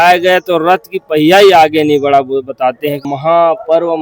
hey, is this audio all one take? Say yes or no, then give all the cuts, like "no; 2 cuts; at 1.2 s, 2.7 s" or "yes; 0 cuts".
no; 1 cut; at 3.1 s